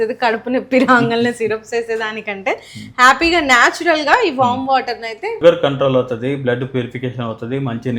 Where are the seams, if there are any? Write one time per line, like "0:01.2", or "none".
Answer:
0:05.4

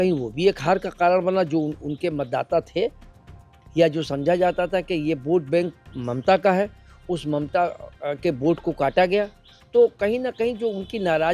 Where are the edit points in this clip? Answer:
none

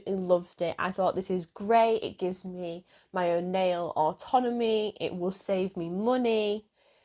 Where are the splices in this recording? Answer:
none

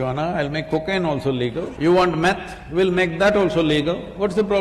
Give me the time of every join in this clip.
0:01.7

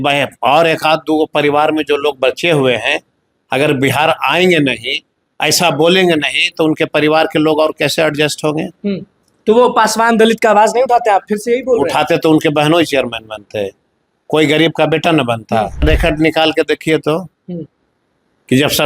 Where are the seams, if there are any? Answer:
0:15.8

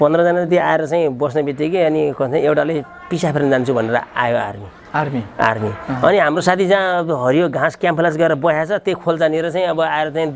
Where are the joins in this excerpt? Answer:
none

